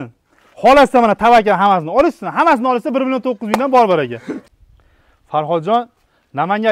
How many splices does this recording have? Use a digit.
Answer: 1